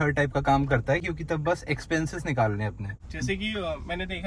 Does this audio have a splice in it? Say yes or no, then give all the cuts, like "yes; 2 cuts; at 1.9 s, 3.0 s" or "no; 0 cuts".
no; 0 cuts